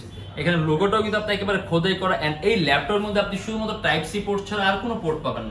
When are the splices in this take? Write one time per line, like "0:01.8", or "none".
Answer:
none